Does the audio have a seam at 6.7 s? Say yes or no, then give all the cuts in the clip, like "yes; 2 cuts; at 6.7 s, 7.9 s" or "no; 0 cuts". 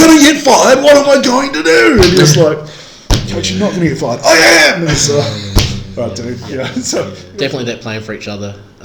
yes; 1 cut; at 6.7 s